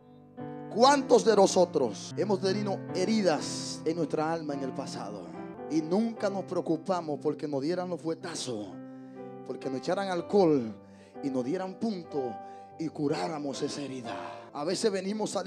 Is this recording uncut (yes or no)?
no